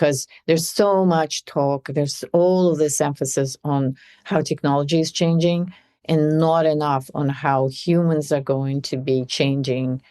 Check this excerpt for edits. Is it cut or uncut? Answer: uncut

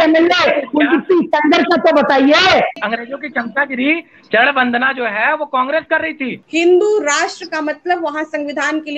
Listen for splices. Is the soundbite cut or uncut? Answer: cut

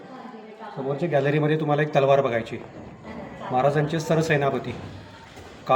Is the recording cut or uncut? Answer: uncut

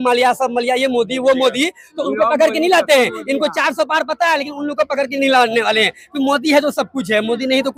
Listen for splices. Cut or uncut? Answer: uncut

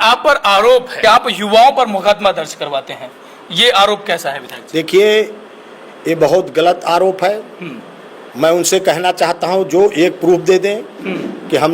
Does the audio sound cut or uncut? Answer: cut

